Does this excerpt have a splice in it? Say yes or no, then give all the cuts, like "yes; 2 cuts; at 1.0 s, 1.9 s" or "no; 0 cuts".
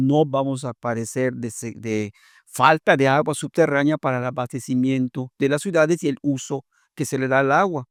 no; 0 cuts